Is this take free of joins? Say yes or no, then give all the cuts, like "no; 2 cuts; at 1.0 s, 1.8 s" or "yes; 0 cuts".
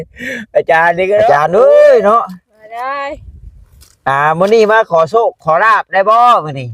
no; 1 cut; at 1.3 s